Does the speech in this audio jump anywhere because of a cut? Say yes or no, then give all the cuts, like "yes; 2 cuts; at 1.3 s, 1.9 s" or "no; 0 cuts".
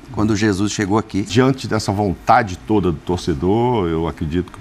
yes; 1 cut; at 1.3 s